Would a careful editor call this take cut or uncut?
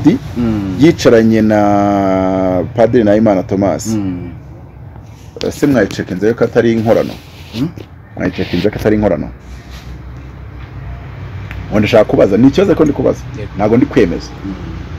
uncut